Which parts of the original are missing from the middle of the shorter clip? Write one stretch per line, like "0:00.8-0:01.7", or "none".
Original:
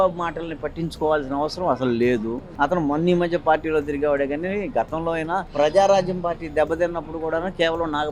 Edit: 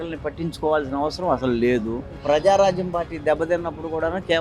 0:02.5-0:05.4